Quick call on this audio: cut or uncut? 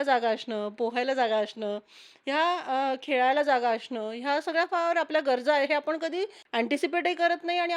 cut